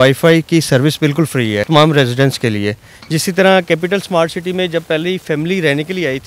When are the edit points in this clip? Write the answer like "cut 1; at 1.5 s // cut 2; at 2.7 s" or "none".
cut 1; at 1.6 s